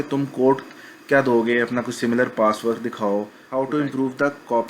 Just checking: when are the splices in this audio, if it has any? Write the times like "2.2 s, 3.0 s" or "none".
3.4 s